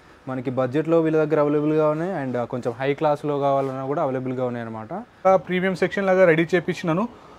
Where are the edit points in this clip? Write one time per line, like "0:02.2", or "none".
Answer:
0:05.2